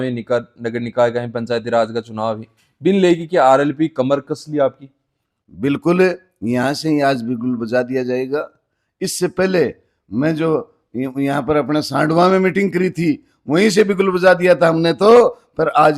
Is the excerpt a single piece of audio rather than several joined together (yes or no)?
yes